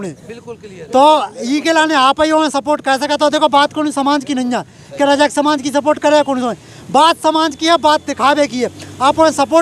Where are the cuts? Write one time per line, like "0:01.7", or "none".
none

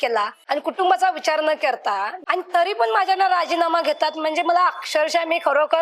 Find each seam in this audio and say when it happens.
0:02.1

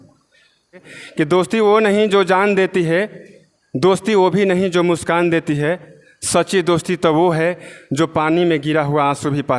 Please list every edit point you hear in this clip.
0:01.0

